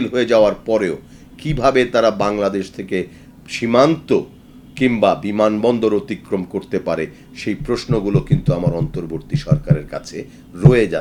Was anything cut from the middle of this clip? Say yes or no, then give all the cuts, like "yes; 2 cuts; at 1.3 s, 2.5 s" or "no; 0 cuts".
no; 0 cuts